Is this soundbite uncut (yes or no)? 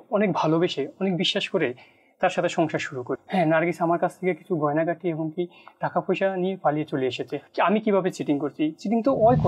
no